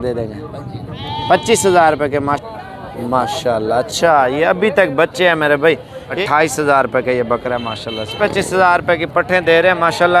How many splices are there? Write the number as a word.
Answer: three